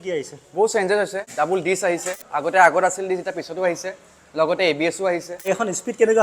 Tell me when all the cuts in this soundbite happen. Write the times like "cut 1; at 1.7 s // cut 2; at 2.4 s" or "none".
cut 1; at 2.2 s // cut 2; at 5.3 s